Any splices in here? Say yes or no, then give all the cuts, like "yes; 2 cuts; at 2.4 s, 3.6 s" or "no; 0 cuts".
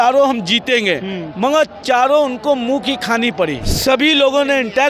yes; 1 cut; at 3.7 s